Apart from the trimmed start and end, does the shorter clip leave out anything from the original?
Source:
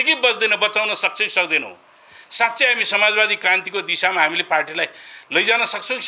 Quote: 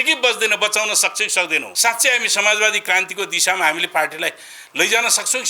yes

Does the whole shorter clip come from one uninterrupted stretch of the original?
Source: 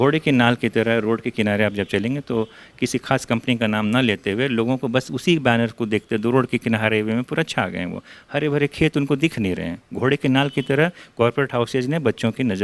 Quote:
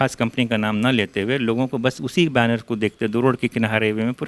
yes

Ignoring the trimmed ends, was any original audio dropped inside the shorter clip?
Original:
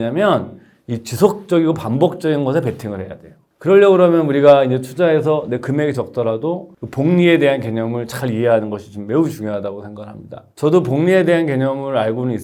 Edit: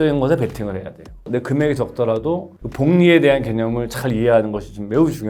yes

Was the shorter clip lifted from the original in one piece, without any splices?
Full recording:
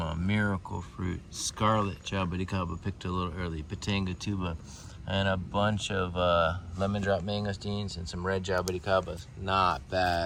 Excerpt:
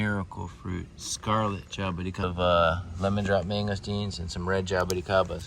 no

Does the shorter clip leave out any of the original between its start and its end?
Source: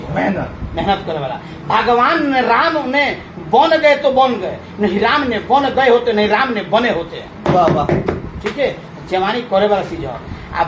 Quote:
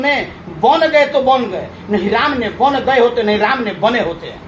no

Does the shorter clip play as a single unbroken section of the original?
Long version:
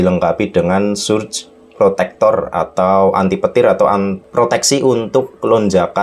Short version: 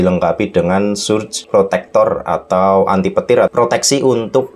no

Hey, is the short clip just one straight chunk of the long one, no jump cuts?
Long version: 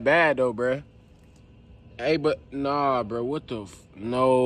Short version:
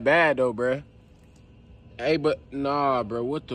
yes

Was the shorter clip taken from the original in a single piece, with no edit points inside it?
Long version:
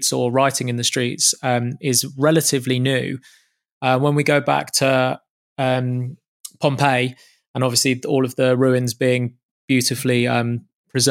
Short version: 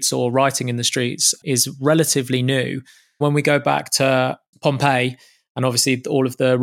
no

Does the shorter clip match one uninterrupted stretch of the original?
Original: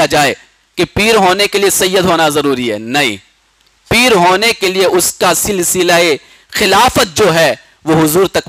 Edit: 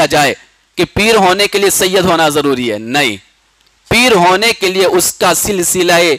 yes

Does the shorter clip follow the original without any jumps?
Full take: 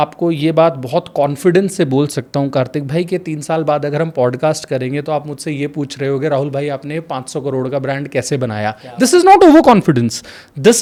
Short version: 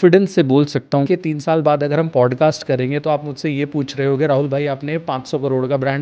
no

